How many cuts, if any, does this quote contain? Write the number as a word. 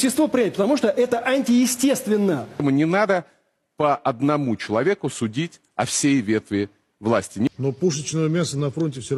two